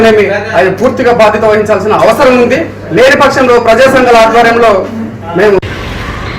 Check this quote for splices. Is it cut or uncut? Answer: uncut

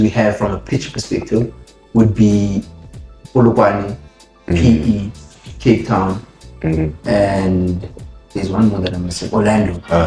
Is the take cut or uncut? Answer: uncut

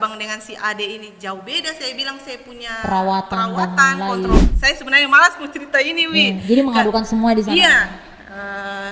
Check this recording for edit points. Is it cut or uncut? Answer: cut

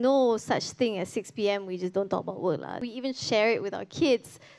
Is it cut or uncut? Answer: cut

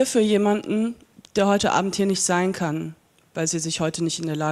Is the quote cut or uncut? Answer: uncut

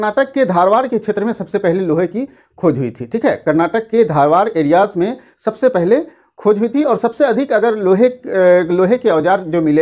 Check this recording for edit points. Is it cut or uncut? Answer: uncut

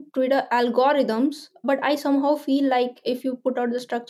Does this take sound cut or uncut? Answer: cut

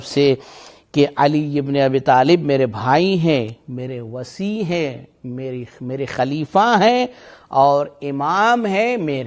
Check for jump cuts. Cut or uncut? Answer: uncut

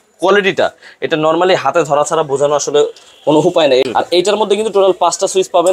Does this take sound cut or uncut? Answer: cut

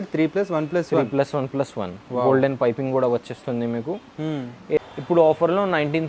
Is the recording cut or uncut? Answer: cut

